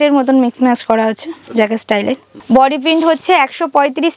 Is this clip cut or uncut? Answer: cut